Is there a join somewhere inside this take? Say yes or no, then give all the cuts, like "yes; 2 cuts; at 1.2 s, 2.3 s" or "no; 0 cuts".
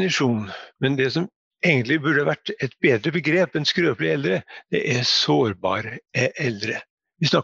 yes; 1 cut; at 1.4 s